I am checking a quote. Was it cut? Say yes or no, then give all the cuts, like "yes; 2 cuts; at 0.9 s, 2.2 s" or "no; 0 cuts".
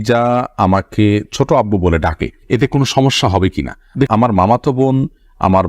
yes; 1 cut; at 4.1 s